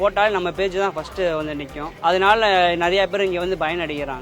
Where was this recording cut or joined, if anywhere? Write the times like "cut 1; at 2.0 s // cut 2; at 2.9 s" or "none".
cut 1; at 1.8 s

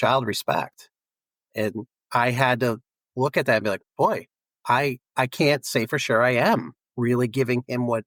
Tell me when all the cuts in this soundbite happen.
none

